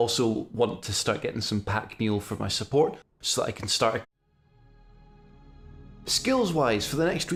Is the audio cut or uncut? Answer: uncut